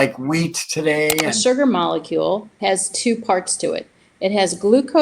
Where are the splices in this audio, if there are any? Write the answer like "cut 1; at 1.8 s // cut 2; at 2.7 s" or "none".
cut 1; at 1.3 s // cut 2; at 2.5 s